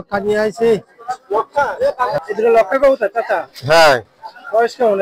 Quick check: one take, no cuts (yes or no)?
yes